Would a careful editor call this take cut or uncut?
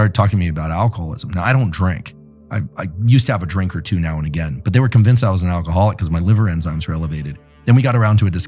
uncut